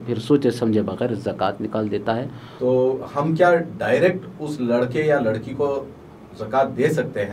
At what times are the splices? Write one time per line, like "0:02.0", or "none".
0:02.4